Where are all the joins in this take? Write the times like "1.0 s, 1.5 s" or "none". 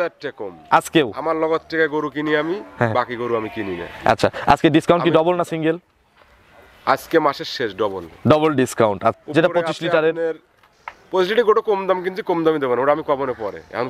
9.2 s

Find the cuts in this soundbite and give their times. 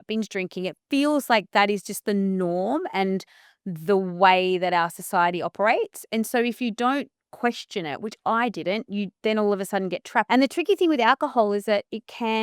10.3 s

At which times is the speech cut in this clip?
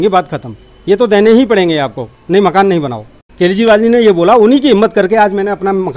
3.0 s

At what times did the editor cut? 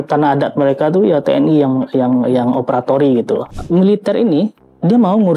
3.5 s

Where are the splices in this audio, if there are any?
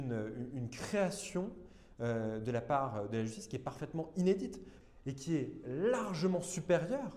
4.8 s

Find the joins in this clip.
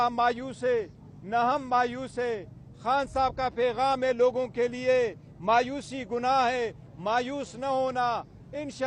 none

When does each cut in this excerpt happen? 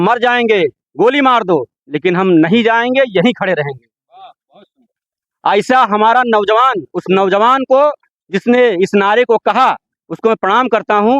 none

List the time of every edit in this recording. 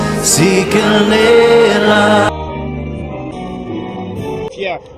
2.3 s

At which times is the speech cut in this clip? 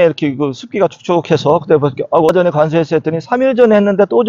2.3 s

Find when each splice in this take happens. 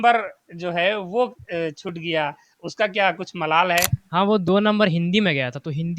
4.0 s

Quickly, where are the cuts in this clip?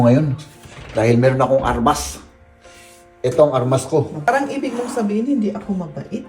4.3 s

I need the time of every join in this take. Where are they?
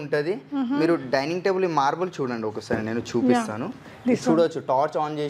none

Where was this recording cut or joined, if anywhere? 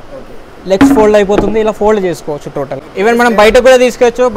none

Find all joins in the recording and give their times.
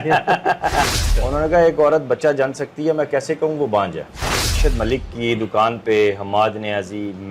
1.0 s, 4.6 s

